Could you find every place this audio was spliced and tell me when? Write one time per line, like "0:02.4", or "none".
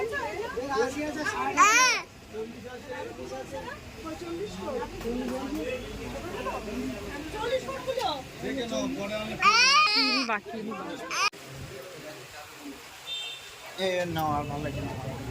0:09.9
0:11.4